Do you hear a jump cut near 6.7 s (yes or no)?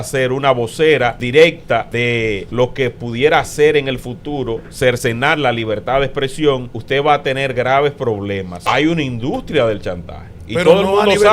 yes